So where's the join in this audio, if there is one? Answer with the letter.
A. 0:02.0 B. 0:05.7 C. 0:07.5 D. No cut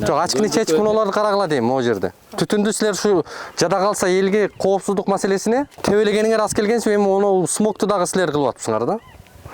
B